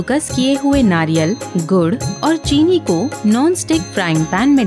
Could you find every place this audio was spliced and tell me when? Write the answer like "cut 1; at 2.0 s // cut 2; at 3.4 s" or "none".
none